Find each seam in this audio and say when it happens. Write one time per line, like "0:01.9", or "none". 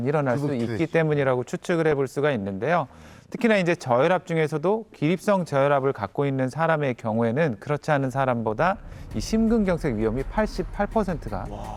none